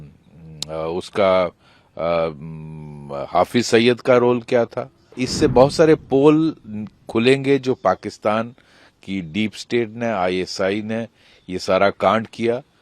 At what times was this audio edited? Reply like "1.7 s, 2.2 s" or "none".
5.2 s